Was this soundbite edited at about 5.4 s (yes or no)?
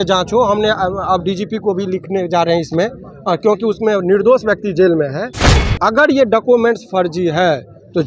yes